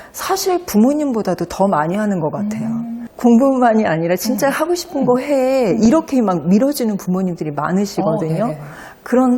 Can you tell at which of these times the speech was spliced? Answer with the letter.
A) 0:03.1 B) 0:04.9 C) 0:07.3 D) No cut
A